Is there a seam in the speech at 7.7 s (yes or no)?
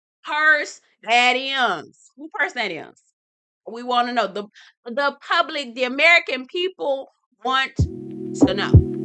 yes